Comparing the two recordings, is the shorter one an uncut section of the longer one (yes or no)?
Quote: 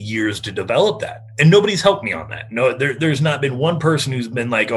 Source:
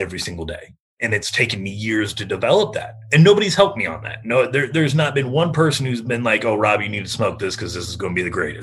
yes